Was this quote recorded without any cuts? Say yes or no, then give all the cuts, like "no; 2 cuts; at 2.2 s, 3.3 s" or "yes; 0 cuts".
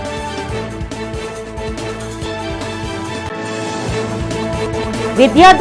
no; 1 cut; at 1.6 s